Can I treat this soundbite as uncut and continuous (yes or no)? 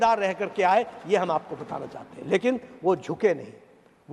yes